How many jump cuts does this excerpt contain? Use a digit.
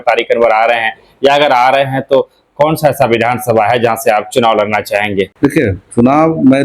1